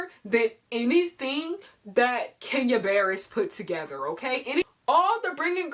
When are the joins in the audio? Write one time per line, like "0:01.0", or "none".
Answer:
0:04.6